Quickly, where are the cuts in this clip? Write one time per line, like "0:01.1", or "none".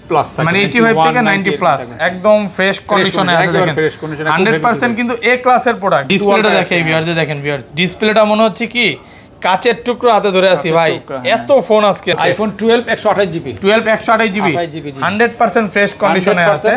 0:06.1
0:12.2